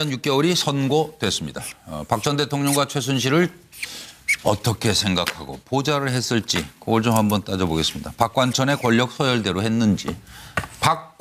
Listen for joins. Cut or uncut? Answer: uncut